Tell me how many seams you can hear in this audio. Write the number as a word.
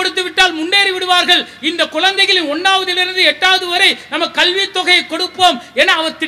zero